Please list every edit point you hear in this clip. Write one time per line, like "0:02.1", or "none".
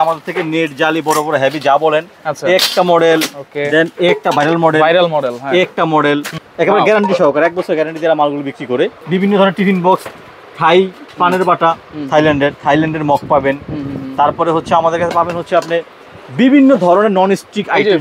0:06.4
0:09.0